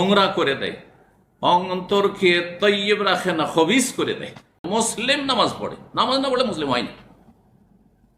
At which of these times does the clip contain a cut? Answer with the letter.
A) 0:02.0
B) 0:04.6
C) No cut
B